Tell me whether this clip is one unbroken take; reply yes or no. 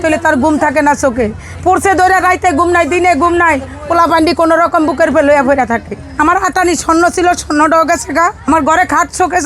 no